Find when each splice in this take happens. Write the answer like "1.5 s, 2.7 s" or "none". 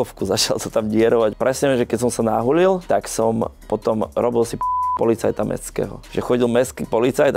none